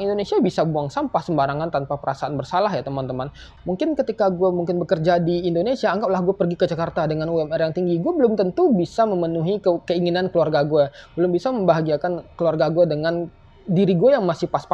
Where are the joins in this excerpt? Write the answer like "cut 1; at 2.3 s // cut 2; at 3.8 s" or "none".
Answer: cut 1; at 3.5 s